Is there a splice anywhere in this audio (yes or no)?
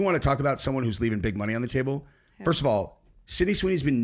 no